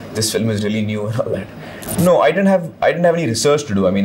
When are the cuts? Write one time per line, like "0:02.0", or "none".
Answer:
0:01.8

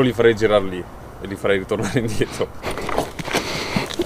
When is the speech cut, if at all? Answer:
0:02.7

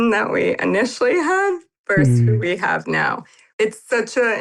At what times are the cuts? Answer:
0:03.4

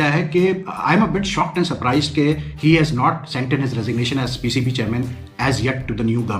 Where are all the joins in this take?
none

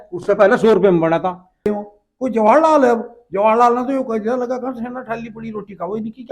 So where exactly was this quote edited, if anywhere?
0:01.7

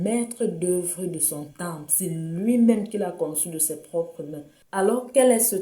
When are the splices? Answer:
0:04.5

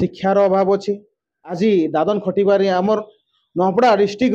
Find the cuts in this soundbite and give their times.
0:01.6

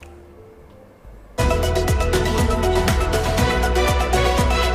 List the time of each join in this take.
0:01.4

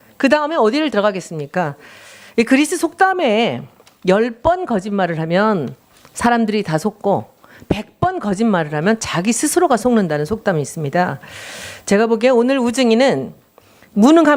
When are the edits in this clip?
none

